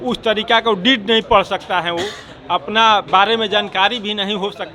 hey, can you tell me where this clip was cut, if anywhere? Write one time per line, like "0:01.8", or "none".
none